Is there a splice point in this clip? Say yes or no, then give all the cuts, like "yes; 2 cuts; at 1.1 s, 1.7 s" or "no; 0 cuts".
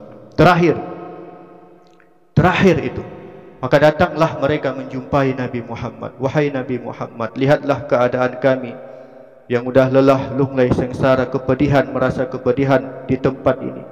no; 0 cuts